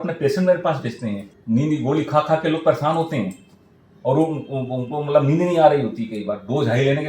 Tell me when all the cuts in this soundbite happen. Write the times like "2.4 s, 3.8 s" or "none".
1.3 s

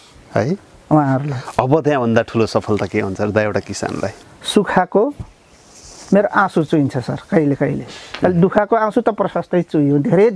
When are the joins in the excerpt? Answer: 4.2 s

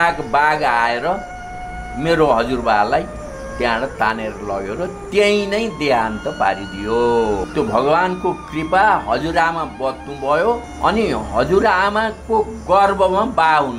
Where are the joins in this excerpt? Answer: 7.5 s, 10.7 s

